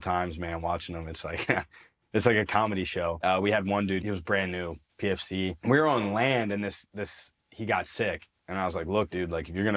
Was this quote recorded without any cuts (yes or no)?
no